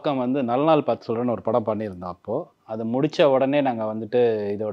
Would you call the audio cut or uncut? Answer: uncut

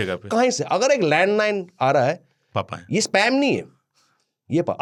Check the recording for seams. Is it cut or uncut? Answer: uncut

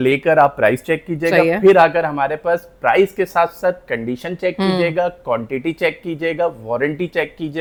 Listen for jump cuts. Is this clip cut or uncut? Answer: uncut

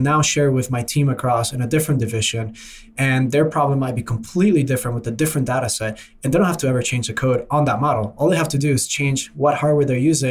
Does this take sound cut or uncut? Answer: uncut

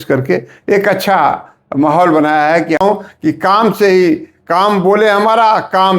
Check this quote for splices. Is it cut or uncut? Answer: cut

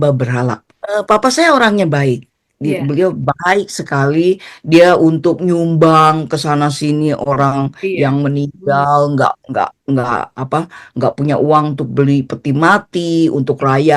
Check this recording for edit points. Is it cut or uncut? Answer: uncut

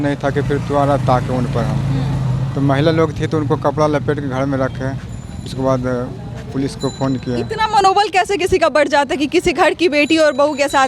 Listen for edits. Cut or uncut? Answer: uncut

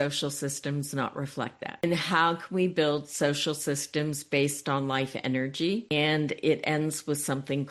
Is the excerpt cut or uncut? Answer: cut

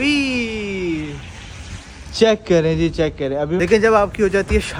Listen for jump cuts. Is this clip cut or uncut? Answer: cut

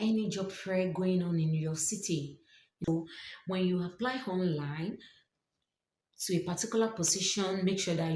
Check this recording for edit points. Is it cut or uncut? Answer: cut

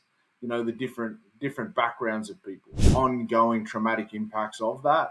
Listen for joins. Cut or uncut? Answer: cut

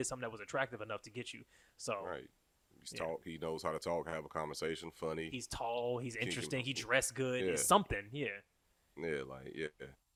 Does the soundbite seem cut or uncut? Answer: uncut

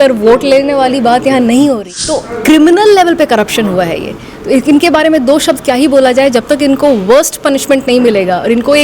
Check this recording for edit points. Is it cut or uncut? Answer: cut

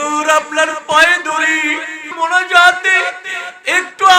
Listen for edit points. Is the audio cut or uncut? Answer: cut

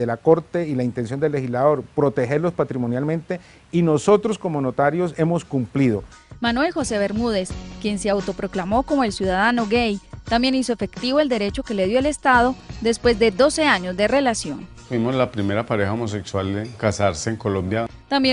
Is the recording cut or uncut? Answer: cut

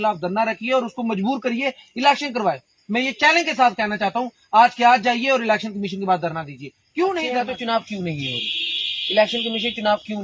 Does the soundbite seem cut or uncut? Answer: cut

